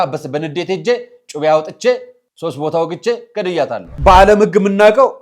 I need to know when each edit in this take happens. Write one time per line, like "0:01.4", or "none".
0:03.9